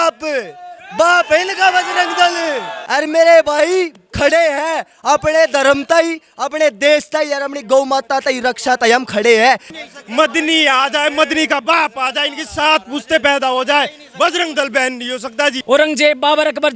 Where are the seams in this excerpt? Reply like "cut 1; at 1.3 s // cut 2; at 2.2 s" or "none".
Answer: cut 1; at 2.7 s // cut 2; at 9.8 s // cut 3; at 15.6 s